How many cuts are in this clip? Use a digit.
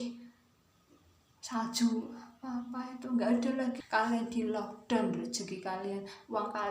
1